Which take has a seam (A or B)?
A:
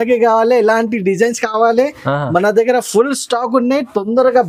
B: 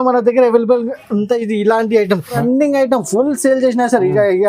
B